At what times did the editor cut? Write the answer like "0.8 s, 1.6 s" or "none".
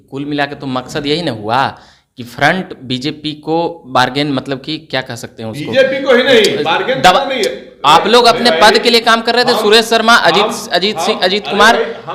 none